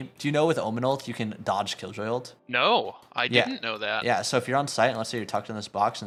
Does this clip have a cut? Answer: no; 0 cuts

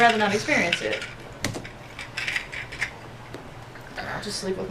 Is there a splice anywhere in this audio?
no; 0 cuts

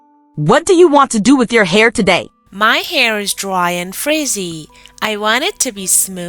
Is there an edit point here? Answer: yes; 1 cut; at 2.4 s

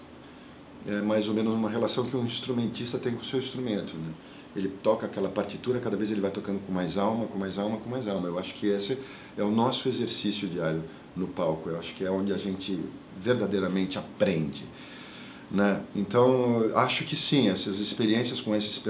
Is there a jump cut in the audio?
no; 0 cuts

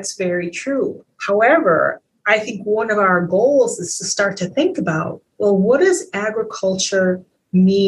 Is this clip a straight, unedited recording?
no; 2 cuts; at 1.1 s, 2.1 s

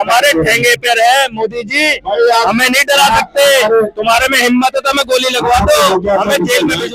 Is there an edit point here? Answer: no; 0 cuts

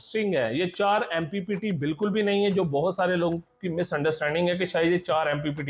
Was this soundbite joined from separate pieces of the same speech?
no; 0 cuts

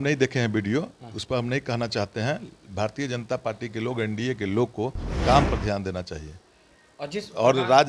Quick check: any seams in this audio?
no; 0 cuts

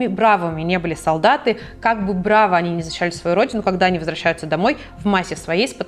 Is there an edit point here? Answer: no; 0 cuts

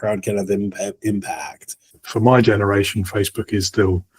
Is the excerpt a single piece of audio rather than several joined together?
no; 1 cut; at 1.9 s

